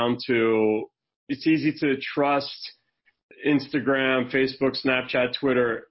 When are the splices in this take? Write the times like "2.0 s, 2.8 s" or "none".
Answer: 1.3 s, 3.4 s